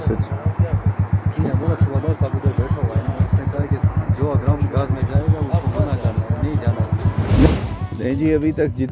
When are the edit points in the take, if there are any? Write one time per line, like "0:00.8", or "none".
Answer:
0:07.5